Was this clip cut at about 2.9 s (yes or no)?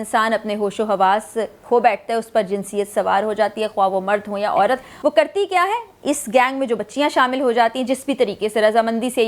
no